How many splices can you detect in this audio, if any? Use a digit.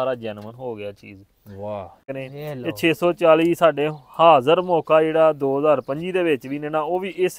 1